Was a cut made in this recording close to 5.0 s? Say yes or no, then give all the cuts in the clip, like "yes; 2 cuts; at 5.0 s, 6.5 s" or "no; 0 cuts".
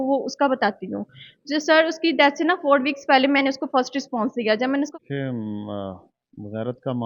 yes; 1 cut; at 5.0 s